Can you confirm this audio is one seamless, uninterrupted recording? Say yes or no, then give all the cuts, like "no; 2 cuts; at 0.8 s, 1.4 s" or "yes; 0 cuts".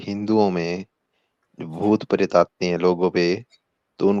yes; 0 cuts